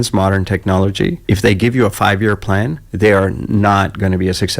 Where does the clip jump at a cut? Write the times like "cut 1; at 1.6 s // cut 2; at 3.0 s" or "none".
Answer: cut 1; at 1.2 s // cut 2; at 2.8 s